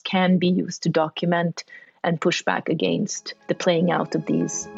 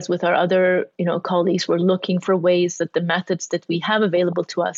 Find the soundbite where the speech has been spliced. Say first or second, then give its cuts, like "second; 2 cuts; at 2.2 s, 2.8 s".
first; 1 cut; at 3.4 s